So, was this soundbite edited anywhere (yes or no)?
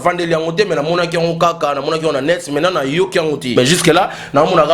yes